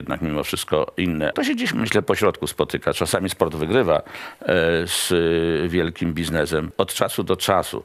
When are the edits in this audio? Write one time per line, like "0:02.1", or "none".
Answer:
0:01.3
0:06.7